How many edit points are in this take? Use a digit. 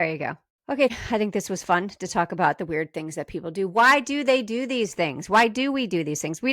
1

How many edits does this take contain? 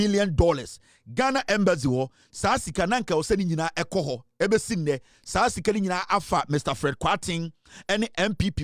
0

